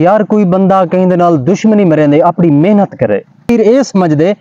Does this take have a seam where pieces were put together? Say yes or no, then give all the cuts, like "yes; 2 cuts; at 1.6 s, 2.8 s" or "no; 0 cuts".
yes; 1 cut; at 3.5 s